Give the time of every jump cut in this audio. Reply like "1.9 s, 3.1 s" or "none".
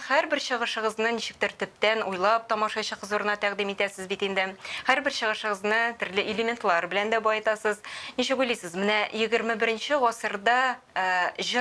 none